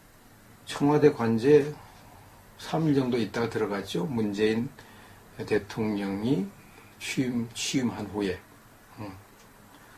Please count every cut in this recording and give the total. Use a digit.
1